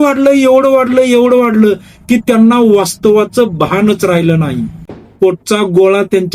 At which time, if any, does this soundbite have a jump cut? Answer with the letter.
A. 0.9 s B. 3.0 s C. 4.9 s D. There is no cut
C